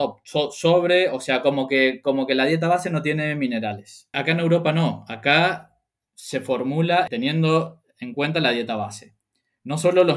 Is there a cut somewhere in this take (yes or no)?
yes